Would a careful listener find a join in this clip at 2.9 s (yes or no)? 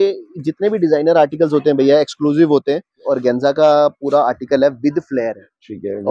yes